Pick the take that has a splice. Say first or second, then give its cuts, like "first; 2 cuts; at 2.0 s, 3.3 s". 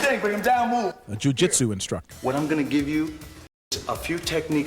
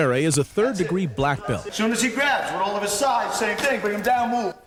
first; 2 cuts; at 2.1 s, 3.7 s